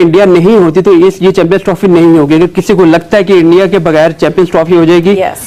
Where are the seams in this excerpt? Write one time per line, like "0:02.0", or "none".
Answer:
none